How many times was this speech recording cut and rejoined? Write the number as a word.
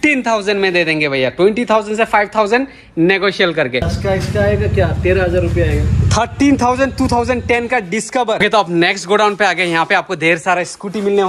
two